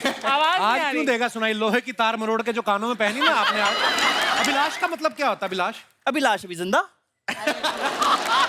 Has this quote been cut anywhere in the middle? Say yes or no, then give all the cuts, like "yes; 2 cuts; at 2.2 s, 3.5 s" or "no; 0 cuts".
yes; 1 cut; at 4.4 s